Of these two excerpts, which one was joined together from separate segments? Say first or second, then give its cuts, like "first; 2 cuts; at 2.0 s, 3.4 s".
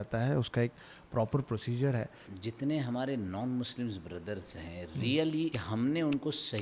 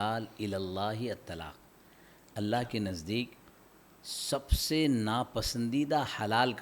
first; 2 cuts; at 2.2 s, 5.6 s